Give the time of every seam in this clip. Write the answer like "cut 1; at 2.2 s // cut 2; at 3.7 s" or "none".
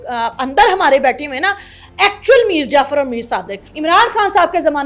cut 1; at 3.7 s

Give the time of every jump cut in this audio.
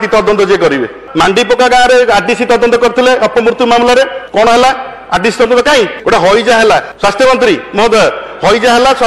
cut 1; at 1.0 s // cut 2; at 4.2 s // cut 3; at 6.0 s // cut 4; at 6.9 s

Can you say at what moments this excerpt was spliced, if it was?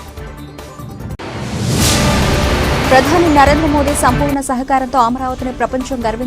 cut 1; at 2.4 s

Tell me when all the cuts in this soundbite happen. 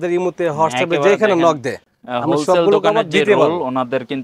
none

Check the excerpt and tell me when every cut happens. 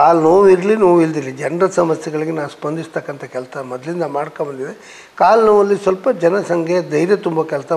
none

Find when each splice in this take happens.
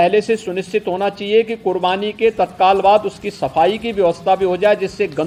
none

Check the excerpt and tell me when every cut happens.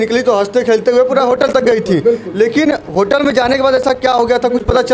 none

